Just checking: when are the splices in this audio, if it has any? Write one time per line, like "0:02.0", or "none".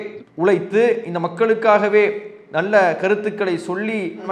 none